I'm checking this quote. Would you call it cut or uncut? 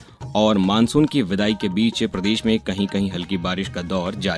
uncut